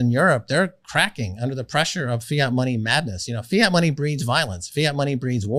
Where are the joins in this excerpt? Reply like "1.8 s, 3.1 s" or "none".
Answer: none